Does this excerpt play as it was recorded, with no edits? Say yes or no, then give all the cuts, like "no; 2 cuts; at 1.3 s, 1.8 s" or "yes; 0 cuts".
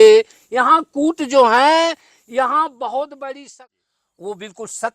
no; 1 cut; at 3.5 s